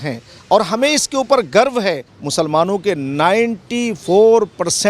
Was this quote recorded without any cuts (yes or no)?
no